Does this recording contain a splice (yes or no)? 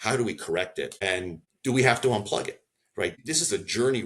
yes